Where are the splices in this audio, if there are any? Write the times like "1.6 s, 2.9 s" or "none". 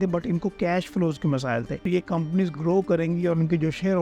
1.8 s